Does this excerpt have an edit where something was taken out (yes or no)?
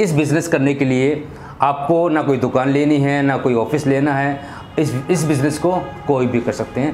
no